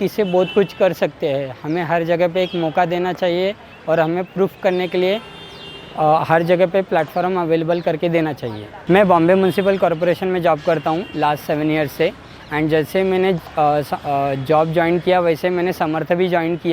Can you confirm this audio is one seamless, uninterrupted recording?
yes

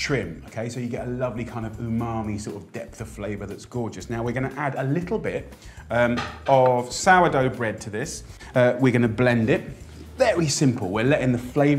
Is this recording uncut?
no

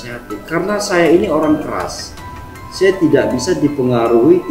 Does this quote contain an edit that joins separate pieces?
no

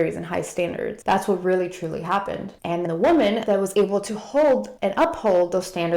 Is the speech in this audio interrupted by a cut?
yes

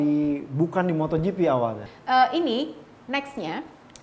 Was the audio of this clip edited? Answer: yes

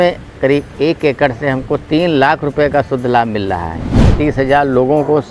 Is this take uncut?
no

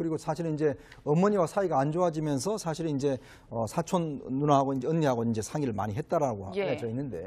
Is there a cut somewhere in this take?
no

